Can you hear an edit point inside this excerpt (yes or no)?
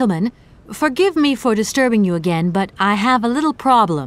no